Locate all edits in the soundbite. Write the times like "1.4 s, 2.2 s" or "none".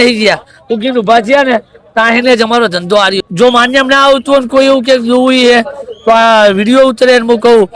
3.1 s

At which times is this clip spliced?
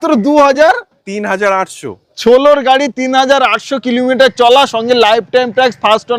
none

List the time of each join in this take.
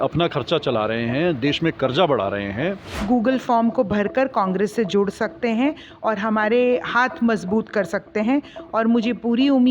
2.9 s

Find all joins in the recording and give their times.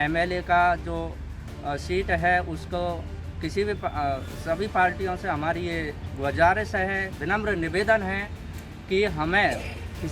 7.1 s

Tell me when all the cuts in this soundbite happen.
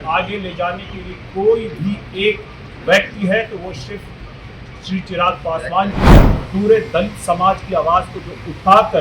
6.3 s

